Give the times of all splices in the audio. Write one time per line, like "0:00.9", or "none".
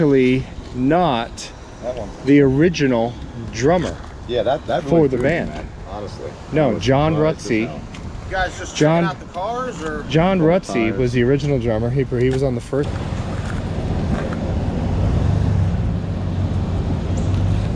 0:12.9